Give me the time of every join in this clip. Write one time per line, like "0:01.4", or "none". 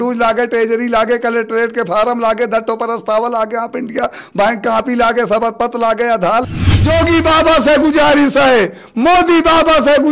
0:06.5